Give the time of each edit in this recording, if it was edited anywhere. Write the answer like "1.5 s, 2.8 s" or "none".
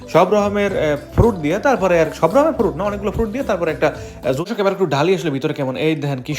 4.4 s